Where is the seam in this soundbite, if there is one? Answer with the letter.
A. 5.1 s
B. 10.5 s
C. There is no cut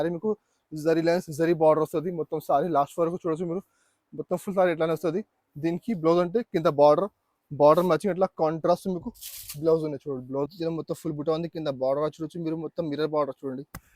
B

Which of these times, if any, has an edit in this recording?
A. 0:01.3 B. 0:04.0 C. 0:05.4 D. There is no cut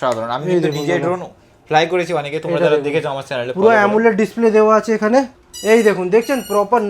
C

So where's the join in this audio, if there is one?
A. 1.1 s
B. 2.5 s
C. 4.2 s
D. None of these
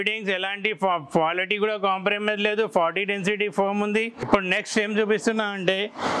C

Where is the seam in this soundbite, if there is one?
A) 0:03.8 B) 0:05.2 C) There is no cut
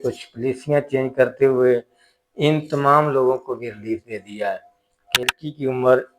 B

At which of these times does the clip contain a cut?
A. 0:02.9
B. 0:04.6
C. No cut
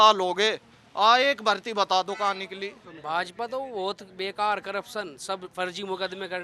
A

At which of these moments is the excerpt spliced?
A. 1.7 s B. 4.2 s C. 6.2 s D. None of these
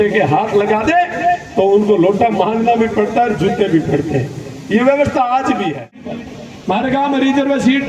C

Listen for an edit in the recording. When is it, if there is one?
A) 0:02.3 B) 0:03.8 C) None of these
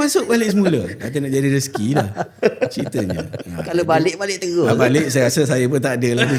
C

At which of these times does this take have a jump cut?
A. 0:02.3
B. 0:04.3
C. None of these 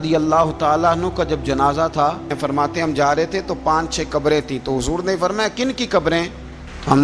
A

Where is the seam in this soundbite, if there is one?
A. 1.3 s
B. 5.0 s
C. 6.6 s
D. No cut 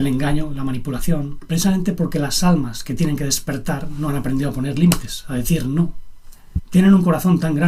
A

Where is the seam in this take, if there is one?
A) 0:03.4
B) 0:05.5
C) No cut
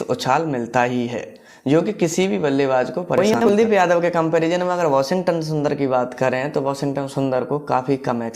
A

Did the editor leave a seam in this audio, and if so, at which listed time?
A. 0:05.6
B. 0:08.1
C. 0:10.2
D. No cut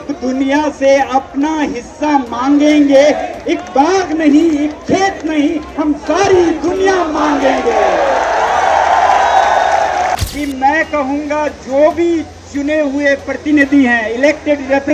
C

